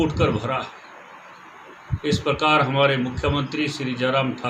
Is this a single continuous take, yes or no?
yes